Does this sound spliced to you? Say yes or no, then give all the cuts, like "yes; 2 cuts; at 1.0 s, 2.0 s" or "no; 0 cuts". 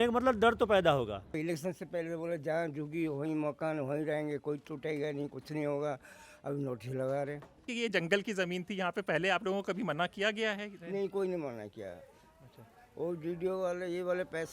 yes; 2 cuts; at 1.3 s, 7.7 s